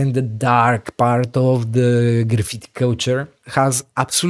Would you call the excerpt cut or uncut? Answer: cut